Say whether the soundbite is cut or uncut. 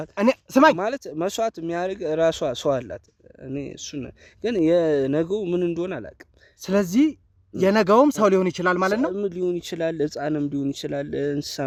uncut